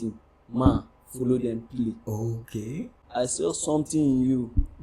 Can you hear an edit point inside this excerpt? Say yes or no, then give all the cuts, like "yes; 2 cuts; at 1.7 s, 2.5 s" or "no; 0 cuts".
yes; 1 cut; at 3.0 s